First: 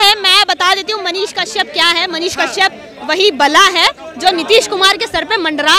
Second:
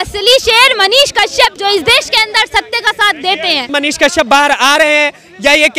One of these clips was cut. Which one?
second; 2 cuts; at 1.5 s, 3.7 s

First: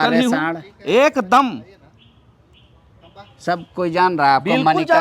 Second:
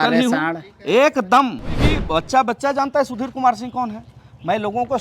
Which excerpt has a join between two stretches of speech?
second; 1 cut; at 1.9 s

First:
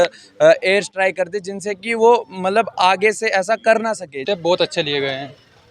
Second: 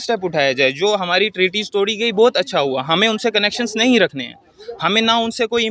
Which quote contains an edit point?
first; 1 cut; at 4.2 s

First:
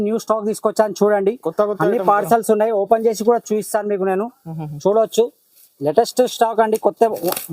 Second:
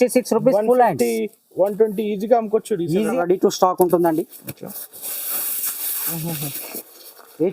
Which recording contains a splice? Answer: second; 1 cut; at 3.1 s

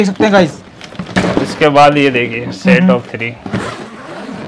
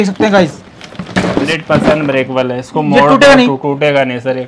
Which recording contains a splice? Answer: second; 1 cut; at 1.5 s

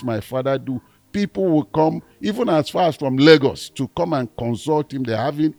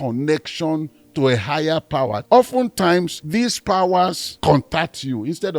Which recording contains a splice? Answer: second; 3 cuts; at 2.2 s, 3.2 s, 4.3 s

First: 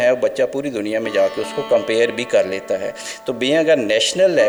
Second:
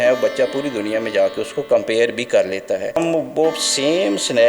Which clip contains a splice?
second; 1 cut; at 3.0 s

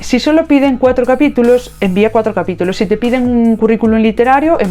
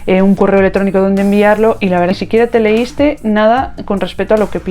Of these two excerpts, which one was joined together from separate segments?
second; 1 cut; at 2.1 s

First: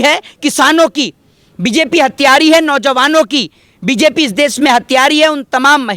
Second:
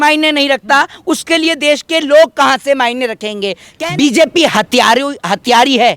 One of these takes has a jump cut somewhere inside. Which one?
second; 1 cut; at 3.6 s

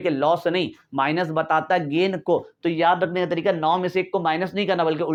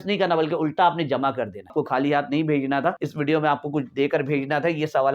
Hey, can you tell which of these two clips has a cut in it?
second; 2 cuts; at 1.7 s, 3.0 s

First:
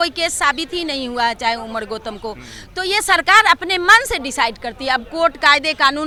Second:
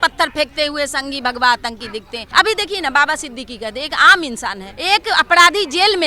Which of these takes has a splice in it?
second; 2 cuts; at 2.2 s, 4.7 s

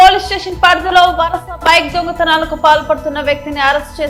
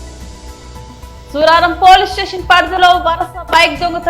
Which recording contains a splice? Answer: second; 1 cut; at 0.9 s

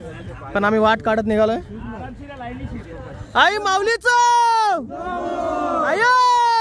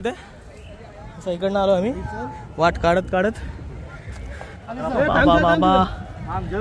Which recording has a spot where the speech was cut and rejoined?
second; 1 cut; at 4.6 s

